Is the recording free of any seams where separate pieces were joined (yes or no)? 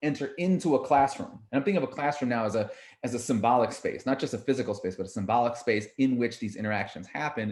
yes